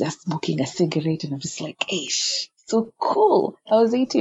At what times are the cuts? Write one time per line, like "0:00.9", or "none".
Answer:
none